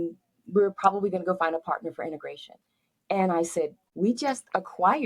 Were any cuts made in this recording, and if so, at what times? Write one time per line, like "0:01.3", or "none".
0:03.8

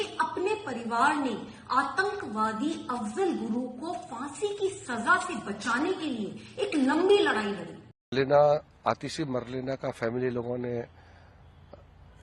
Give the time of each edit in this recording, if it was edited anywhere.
0:08.1

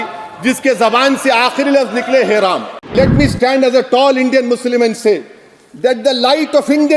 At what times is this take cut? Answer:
0:02.9

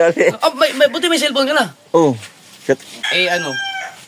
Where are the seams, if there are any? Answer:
0:03.0

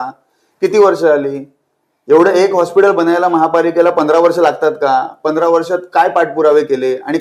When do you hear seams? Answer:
none

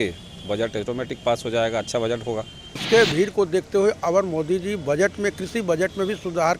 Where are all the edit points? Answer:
0:02.8

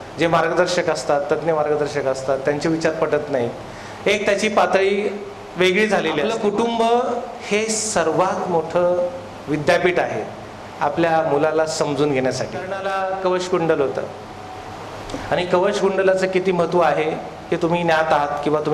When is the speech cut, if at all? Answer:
0:06.3
0:12.8

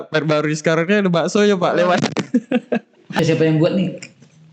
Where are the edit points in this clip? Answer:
0:03.2

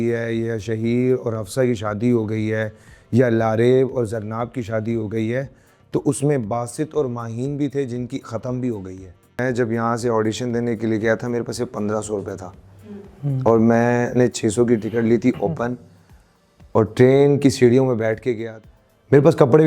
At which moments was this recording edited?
0:09.4
0:18.5

